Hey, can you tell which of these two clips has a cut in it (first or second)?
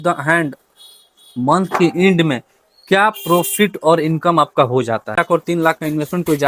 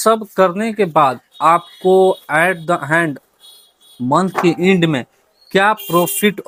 first